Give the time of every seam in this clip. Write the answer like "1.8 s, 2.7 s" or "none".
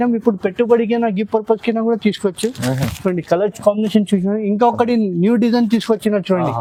none